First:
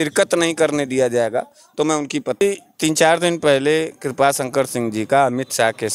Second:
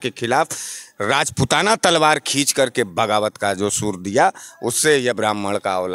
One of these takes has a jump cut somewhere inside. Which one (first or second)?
first